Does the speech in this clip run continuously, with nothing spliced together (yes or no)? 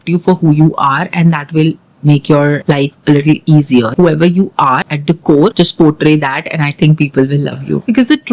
yes